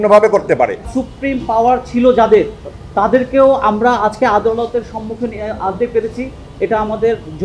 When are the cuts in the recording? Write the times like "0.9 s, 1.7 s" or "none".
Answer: 0.9 s